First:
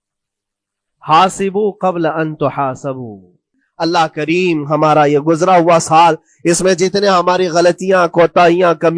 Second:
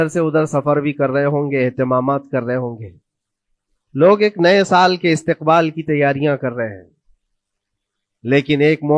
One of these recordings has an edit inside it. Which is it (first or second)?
first